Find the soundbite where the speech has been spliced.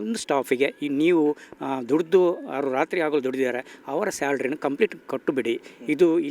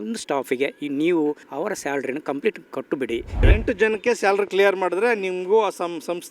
second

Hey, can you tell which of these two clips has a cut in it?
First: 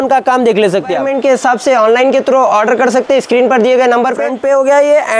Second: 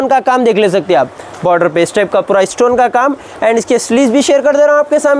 first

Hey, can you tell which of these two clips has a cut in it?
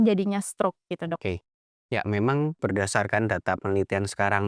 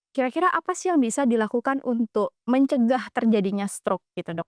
first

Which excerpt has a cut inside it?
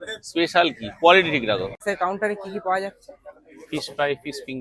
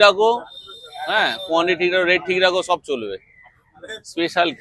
first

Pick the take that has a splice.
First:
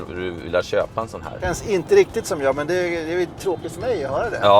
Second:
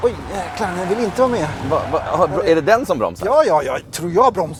first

